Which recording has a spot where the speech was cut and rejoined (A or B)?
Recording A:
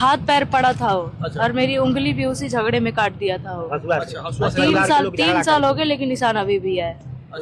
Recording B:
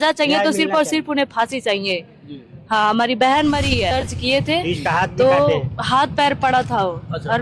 B